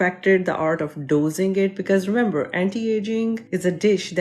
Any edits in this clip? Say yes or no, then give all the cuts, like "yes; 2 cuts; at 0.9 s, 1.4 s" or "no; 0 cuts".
no; 0 cuts